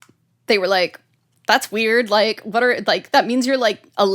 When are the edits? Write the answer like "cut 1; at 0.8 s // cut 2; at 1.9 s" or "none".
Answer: none